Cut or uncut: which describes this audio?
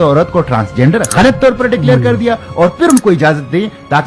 uncut